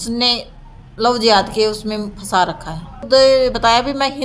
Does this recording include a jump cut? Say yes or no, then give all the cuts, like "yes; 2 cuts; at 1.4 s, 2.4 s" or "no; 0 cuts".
yes; 1 cut; at 3.0 s